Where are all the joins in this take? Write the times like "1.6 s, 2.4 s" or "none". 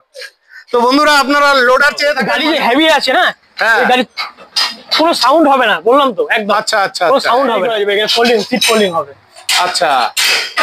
2.3 s, 7.7 s